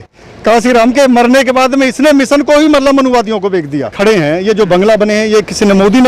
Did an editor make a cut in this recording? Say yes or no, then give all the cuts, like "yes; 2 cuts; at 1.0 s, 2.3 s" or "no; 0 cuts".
yes; 1 cut; at 3.9 s